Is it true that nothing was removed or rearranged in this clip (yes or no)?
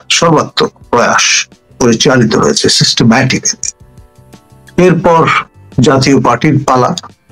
yes